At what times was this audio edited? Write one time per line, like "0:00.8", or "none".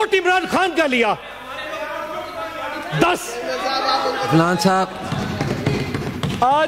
0:05.0